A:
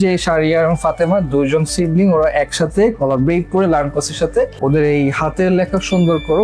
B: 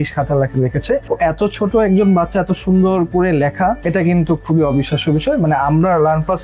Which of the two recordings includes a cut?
A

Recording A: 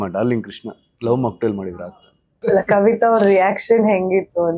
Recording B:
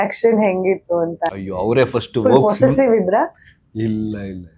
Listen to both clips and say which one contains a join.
A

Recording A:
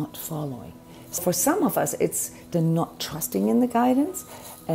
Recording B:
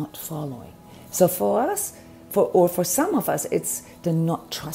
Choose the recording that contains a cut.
A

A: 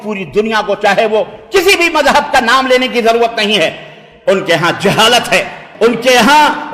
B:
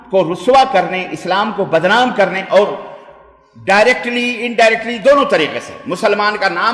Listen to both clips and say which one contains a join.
A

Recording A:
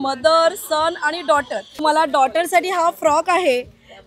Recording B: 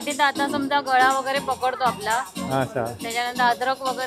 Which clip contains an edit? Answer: A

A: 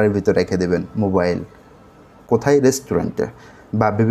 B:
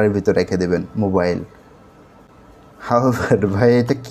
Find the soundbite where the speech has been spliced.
A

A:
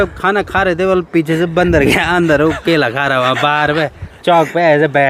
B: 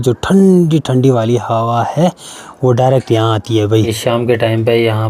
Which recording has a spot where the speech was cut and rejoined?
B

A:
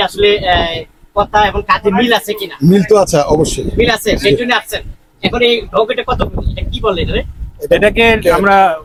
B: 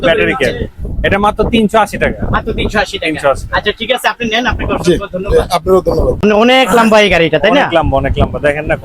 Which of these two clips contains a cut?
B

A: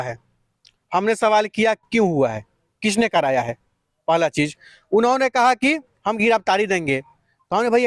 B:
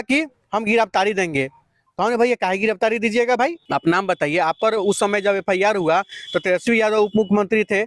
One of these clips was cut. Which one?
B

